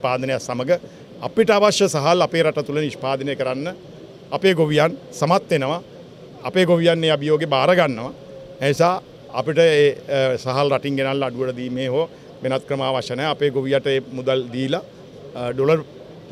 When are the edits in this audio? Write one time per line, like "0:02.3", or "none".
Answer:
none